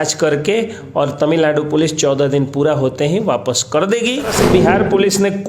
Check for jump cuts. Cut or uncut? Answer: cut